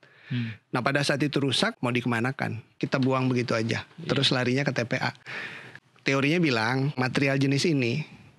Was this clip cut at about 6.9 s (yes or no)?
yes